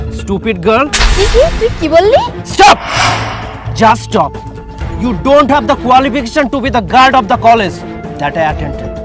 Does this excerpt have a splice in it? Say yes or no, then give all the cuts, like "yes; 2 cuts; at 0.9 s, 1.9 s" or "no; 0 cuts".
no; 0 cuts